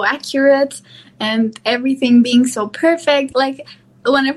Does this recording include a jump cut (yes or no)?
yes